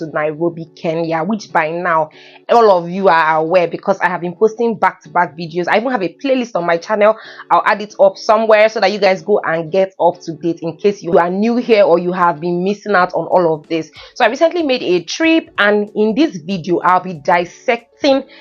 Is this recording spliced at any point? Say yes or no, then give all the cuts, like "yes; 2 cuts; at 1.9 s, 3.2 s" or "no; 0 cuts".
no; 0 cuts